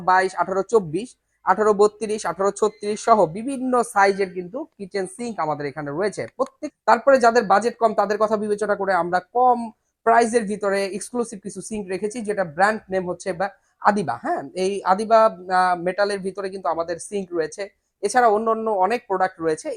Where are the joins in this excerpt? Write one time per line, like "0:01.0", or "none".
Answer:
0:06.6